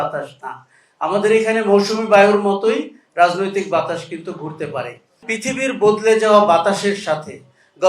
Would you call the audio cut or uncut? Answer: cut